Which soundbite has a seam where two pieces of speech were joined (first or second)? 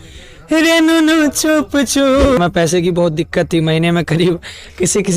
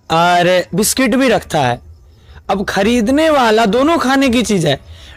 first